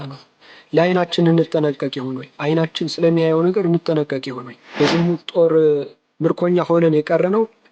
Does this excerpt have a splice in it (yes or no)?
yes